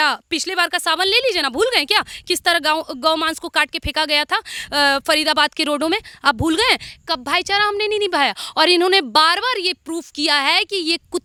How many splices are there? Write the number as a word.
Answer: zero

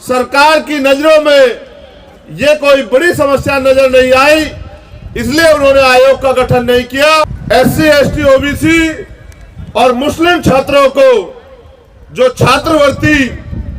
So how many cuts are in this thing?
one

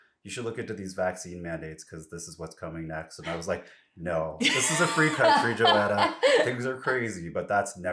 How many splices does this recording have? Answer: zero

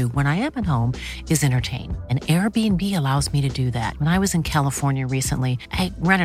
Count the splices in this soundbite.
zero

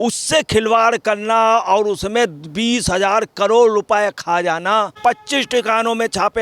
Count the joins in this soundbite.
one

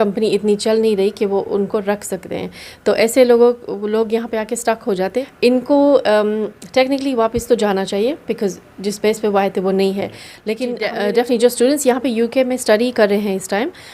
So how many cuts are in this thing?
two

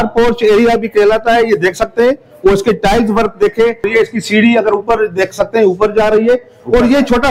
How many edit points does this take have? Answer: one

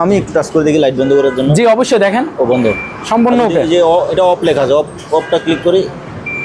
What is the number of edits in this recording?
zero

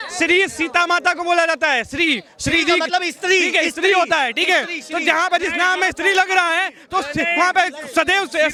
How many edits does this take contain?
zero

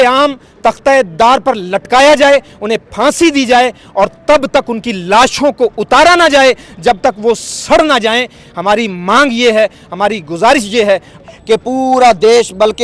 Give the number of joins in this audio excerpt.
one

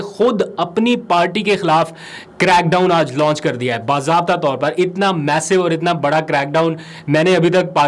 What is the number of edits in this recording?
zero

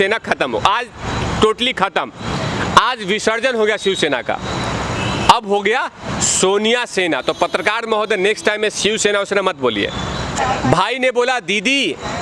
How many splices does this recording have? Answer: one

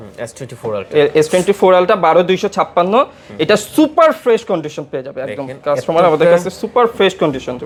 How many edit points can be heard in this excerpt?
zero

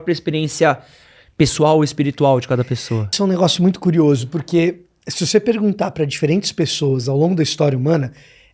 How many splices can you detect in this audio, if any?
one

